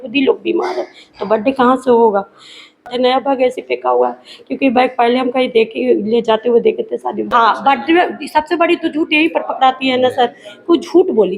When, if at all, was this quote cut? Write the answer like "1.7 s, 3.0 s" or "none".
2.9 s, 7.3 s